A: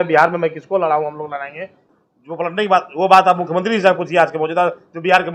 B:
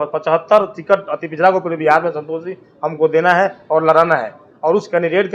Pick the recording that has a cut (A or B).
A